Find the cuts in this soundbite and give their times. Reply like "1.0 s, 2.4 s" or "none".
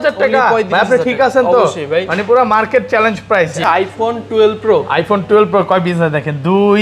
3.6 s